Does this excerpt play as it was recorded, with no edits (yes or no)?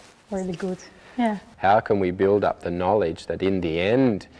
no